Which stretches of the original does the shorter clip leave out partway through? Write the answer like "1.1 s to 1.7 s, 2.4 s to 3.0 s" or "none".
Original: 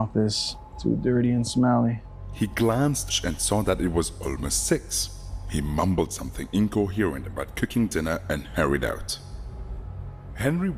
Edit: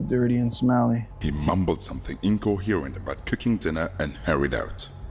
2.1 s to 5.4 s